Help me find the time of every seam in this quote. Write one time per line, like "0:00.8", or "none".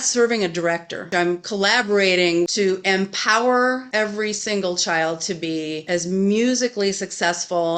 0:01.0
0:02.5
0:03.9

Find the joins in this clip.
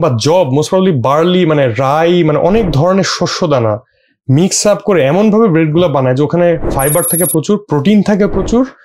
none

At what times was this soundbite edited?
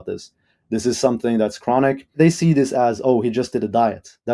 0:02.1

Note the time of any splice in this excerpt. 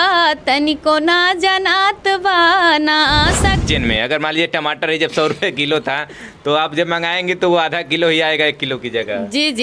0:03.6

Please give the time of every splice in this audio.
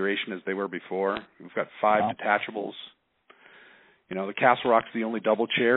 none

